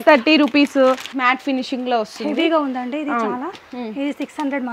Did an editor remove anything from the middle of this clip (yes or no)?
yes